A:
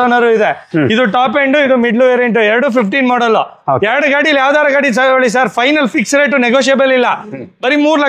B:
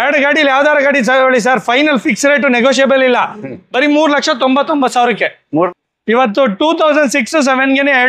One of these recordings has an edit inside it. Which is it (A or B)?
B